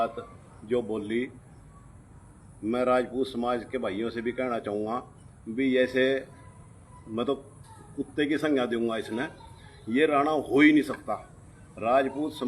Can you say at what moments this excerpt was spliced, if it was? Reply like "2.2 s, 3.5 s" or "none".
none